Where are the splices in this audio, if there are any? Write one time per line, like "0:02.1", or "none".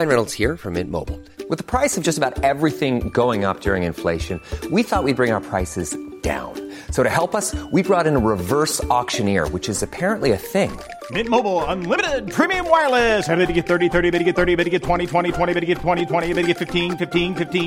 none